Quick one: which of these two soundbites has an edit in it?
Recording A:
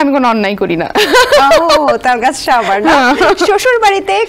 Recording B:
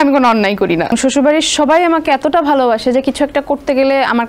B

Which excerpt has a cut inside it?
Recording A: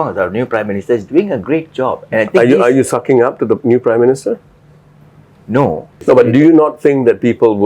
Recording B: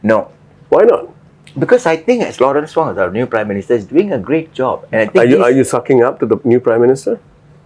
A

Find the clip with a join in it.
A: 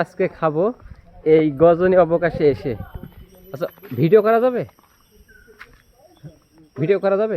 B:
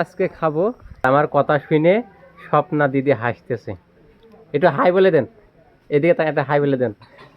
B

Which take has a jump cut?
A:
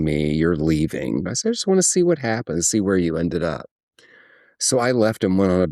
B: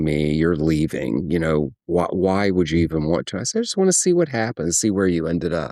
A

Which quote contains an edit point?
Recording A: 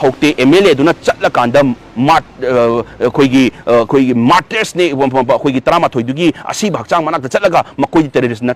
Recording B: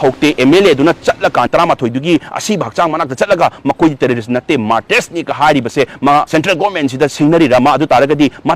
B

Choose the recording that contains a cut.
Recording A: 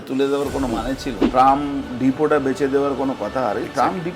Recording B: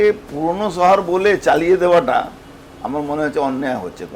A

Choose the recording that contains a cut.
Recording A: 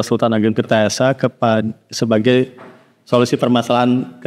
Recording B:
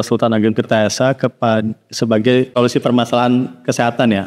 B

